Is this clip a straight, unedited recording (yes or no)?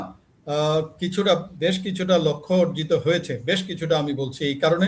yes